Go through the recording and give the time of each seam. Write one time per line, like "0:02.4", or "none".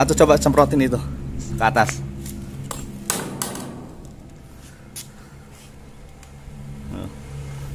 none